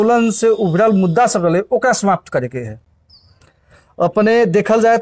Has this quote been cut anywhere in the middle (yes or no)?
no